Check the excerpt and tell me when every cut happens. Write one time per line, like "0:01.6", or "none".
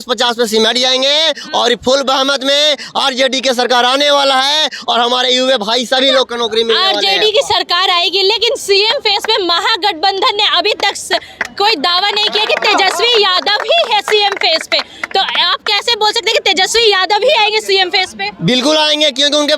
none